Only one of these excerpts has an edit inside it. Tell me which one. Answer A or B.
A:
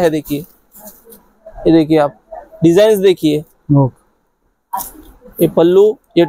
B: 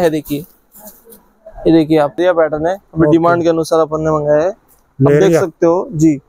B